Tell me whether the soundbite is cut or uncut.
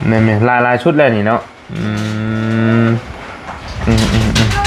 uncut